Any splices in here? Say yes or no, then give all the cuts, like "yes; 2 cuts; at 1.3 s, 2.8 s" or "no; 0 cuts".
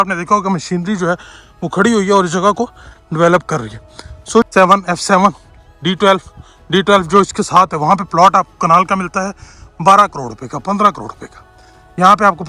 yes; 1 cut; at 4.5 s